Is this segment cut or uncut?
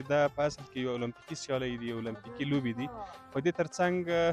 uncut